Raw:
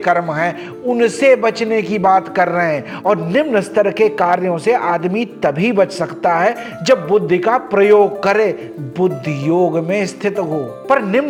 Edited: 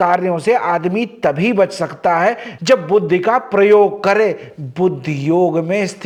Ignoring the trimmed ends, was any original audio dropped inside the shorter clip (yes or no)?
no